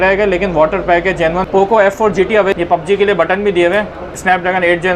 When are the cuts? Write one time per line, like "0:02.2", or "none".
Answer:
0:01.4
0:02.5
0:04.1